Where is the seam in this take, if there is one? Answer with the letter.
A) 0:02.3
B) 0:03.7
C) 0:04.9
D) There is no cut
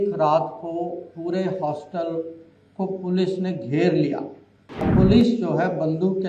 C